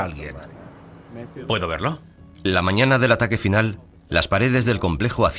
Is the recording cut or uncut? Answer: cut